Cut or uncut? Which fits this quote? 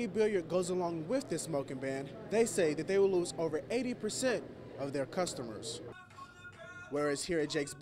uncut